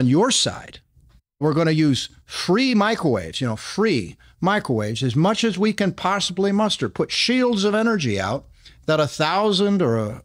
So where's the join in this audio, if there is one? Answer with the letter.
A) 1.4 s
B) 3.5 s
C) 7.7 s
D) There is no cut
A